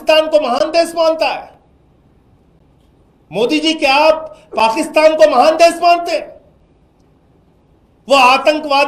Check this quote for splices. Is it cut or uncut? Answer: uncut